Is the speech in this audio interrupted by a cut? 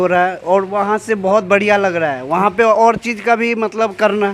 no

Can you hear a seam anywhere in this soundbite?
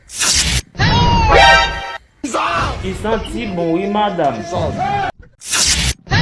yes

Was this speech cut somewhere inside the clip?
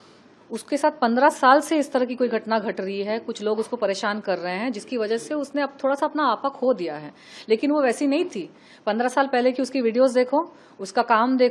no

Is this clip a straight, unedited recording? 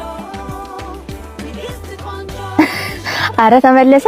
no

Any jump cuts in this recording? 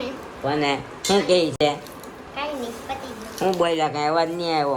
no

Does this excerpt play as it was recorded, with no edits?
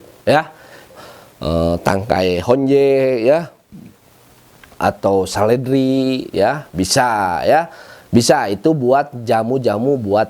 no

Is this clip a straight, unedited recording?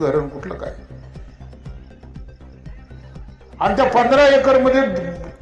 no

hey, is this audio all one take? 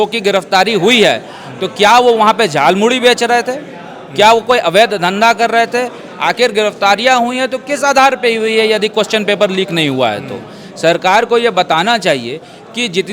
yes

